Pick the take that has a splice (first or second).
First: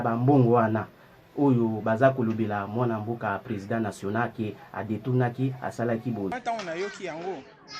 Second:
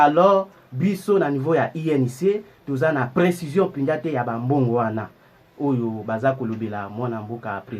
first